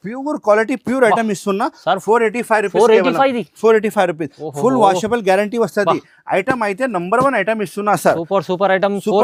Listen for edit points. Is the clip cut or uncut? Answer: uncut